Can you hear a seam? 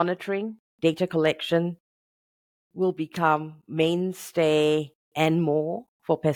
no; 0 cuts

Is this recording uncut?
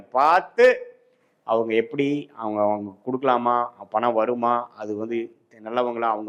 yes; 0 cuts

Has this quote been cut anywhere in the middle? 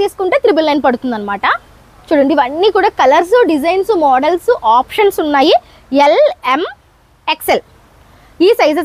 no; 0 cuts

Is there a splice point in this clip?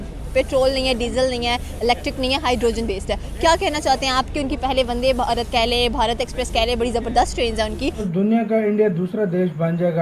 yes; 1 cut; at 8.1 s

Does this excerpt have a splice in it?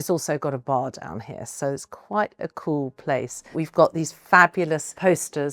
no; 0 cuts

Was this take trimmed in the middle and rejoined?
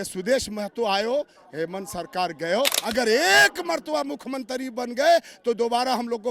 yes; 1 cut; at 2.8 s

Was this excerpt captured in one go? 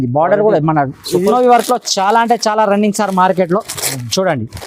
no; 1 cut; at 1.3 s

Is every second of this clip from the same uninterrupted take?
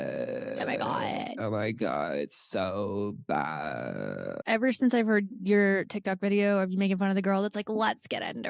no; 1 cut; at 4.4 s

